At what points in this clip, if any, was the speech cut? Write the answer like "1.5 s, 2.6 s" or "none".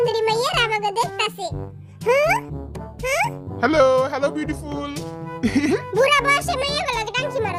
none